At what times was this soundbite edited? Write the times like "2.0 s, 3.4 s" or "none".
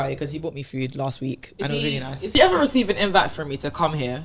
2.3 s